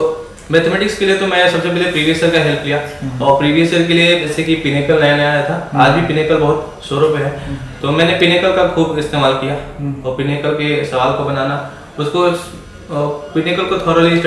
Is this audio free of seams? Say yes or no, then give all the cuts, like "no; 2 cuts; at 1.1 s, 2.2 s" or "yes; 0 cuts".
no; 1 cut; at 4.3 s